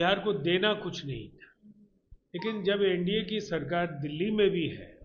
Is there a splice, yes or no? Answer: no